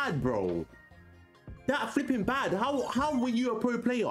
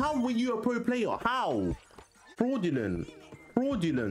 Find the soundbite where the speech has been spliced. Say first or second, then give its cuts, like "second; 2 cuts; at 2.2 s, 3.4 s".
second; 1 cut; at 2.3 s